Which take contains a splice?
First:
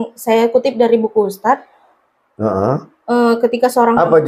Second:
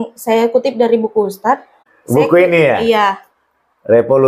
second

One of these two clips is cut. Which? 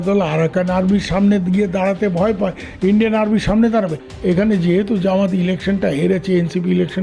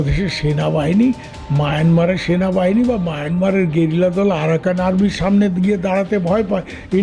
first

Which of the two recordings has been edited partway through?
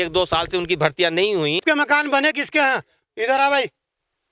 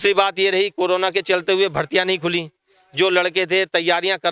first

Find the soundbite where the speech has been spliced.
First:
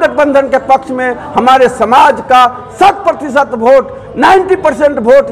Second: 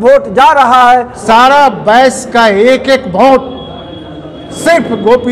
second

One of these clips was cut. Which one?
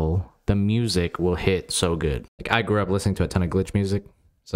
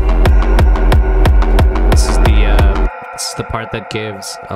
first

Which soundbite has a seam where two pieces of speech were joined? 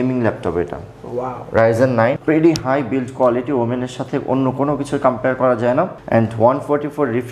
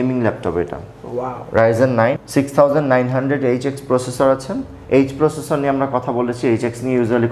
first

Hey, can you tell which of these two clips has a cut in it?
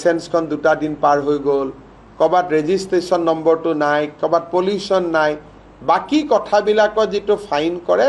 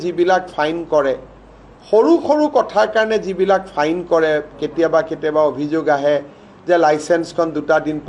second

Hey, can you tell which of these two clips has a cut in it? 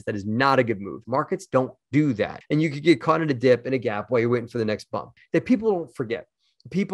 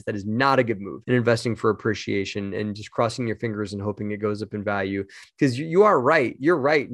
first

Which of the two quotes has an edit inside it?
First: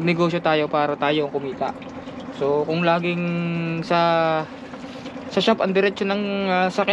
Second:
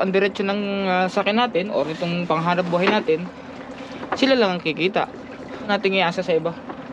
second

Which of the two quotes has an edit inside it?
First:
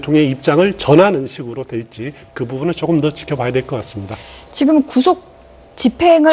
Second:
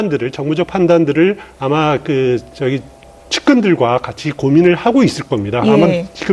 first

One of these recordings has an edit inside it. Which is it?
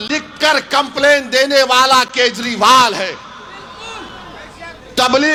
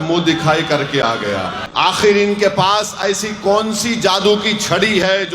second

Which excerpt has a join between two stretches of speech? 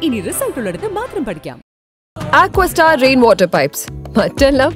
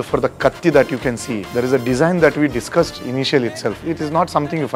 second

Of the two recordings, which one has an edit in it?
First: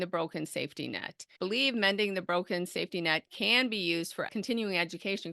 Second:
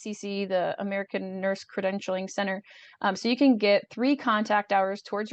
first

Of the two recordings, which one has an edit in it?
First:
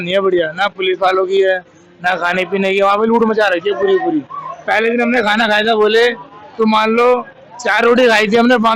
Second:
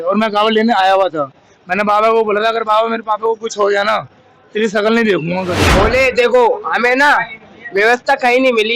second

